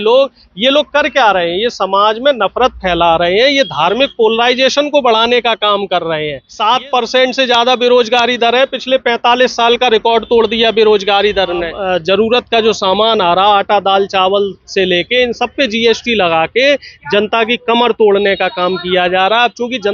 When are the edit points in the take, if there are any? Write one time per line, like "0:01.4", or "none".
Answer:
0:06.4
0:11.8